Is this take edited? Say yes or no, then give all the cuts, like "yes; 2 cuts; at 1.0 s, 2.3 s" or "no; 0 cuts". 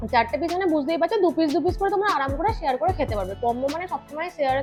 no; 0 cuts